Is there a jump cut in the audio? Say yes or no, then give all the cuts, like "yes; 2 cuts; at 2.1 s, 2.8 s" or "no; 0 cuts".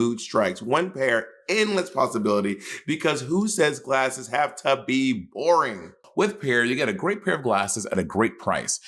yes; 1 cut; at 6.0 s